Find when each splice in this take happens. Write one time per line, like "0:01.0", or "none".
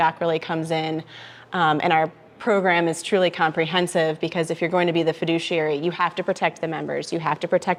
none